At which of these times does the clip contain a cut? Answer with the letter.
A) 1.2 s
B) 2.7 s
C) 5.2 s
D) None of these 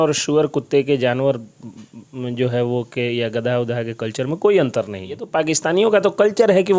C